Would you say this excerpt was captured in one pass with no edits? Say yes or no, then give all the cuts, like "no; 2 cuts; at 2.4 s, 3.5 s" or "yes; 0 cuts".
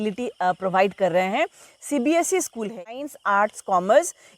no; 1 cut; at 2.7 s